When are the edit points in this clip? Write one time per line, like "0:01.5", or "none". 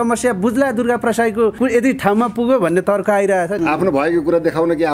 0:03.6